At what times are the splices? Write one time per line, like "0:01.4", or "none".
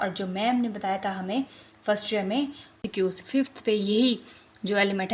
0:02.7